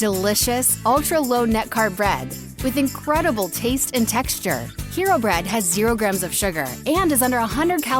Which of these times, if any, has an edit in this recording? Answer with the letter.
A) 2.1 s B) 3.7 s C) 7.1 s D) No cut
D